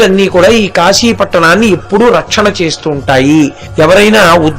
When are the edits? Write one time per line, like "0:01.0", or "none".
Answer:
0:03.6